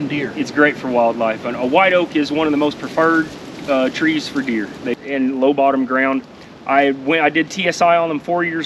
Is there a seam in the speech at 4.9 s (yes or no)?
yes